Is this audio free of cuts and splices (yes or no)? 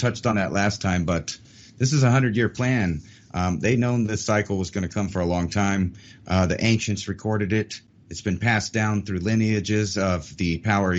yes